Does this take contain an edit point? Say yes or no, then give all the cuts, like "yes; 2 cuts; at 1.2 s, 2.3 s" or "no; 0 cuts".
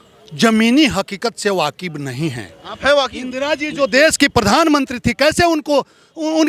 no; 0 cuts